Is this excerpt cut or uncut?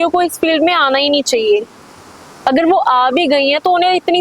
uncut